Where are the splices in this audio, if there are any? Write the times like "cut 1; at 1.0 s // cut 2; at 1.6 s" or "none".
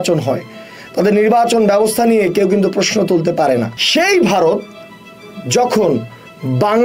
cut 1; at 3.8 s

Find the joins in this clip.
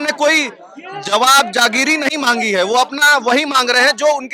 none

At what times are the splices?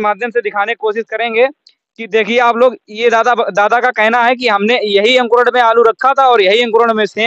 none

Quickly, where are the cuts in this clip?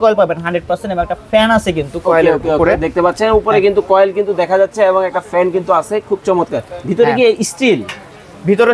none

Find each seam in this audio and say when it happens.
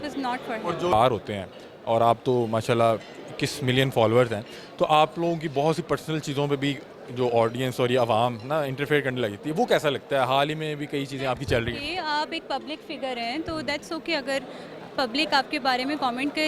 cut 1; at 0.9 s

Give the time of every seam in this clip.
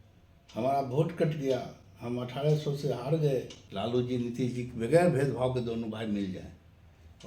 cut 1; at 3.6 s

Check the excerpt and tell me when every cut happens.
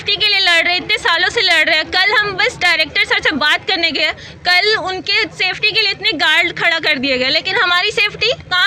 none

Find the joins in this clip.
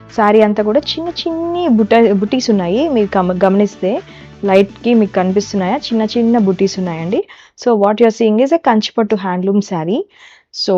none

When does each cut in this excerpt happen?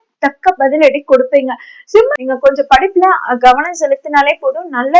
cut 1; at 1.7 s

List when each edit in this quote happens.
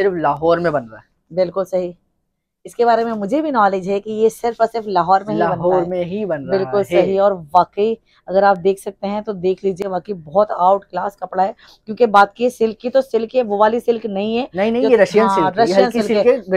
none

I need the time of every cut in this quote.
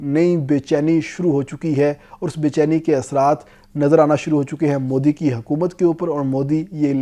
none

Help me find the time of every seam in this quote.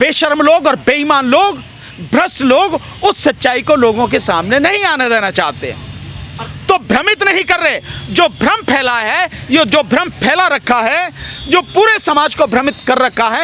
none

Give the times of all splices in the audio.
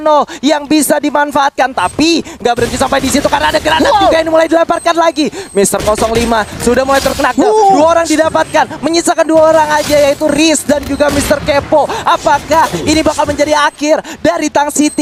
none

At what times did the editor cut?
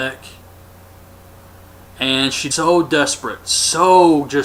none

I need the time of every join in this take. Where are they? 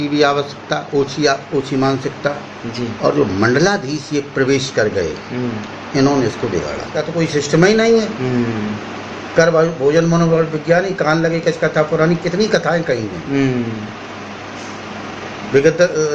cut 1; at 7.0 s

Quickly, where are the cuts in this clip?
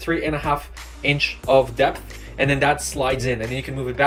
none

